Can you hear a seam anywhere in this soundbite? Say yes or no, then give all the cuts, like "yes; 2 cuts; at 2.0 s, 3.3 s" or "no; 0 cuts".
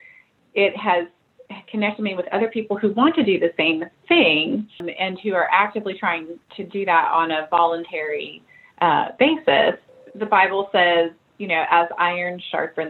no; 0 cuts